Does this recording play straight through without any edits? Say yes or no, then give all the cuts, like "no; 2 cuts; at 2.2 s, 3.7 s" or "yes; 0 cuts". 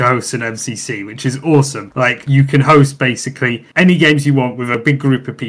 yes; 0 cuts